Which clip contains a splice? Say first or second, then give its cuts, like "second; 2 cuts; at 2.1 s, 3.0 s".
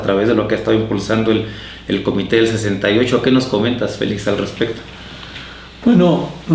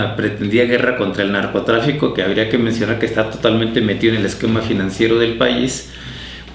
second; 1 cut; at 4.7 s